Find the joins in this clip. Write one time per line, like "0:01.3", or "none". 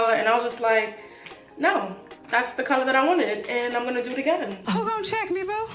0:04.6

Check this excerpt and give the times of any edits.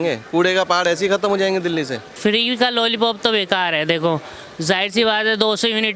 0:02.0

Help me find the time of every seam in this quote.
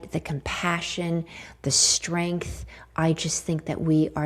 none

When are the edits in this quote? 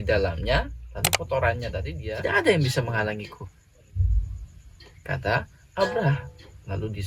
0:01.8

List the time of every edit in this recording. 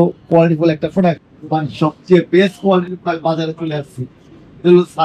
0:01.3

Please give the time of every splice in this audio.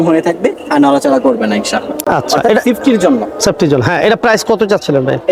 none

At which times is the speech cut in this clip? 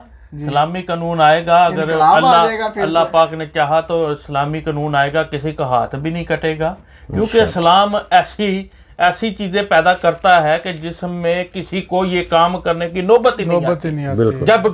none

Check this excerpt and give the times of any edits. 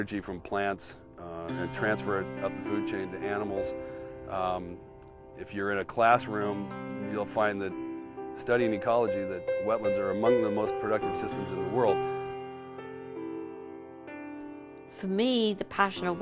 0:14.5

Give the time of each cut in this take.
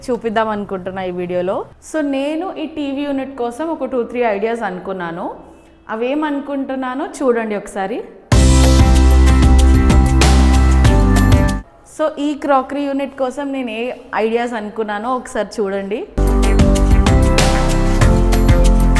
0:01.7
0:11.5

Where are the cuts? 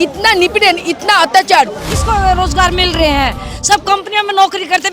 0:01.8

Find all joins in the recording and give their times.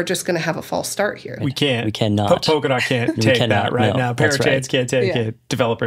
0:01.4

